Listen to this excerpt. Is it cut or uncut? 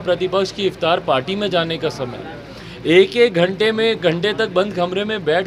uncut